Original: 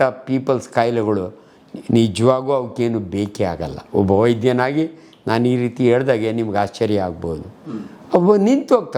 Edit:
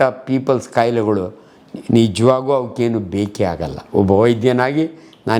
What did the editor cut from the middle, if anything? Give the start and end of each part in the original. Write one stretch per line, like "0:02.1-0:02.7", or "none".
none